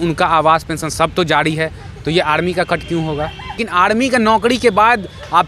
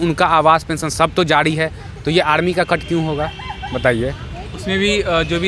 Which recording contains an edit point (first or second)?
first